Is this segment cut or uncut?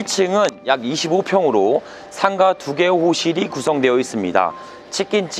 uncut